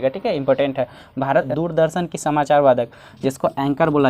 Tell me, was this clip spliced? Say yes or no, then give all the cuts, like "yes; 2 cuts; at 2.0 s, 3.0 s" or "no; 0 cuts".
yes; 1 cut; at 1.5 s